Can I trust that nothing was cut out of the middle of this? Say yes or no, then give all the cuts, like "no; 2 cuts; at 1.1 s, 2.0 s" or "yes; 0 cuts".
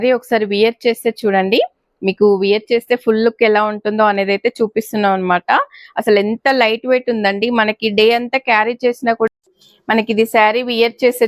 no; 1 cut; at 9.3 s